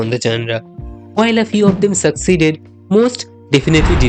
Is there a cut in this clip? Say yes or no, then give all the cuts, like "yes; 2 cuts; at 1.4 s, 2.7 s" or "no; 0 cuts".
no; 0 cuts